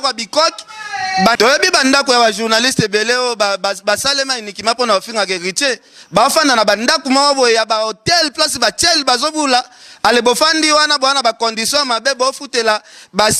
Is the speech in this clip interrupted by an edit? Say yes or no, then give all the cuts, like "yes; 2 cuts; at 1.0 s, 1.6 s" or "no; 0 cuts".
no; 0 cuts